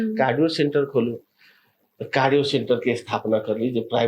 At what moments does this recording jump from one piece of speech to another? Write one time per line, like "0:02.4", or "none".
none